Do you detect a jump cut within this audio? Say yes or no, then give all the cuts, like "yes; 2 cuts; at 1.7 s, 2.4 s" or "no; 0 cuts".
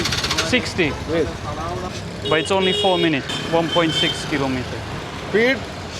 yes; 2 cuts; at 3.3 s, 5.0 s